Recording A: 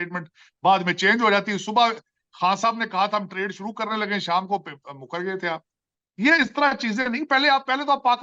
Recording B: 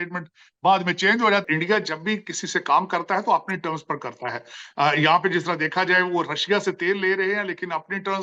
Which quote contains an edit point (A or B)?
B